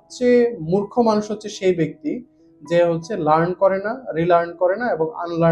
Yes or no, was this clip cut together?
no